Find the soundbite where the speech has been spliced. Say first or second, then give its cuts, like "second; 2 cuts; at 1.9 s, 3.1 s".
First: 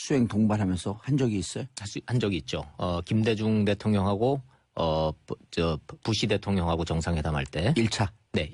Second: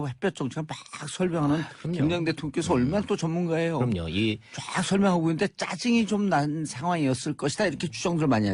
second; 1 cut; at 3.0 s